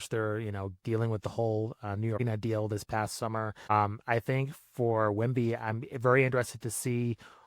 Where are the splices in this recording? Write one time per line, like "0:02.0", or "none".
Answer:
0:02.2
0:03.7